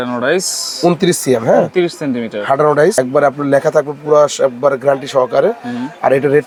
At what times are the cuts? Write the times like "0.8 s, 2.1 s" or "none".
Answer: none